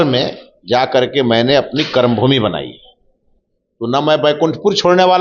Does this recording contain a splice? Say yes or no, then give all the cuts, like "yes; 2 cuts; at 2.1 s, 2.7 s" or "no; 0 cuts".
no; 0 cuts